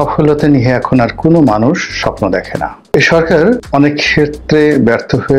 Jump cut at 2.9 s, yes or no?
yes